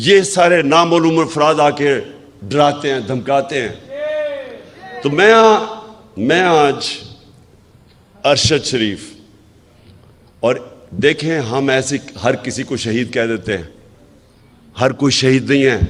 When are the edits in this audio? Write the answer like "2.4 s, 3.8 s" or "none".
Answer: none